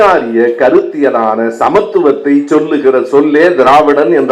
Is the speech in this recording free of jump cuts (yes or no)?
yes